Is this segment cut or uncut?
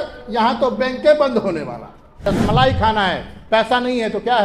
cut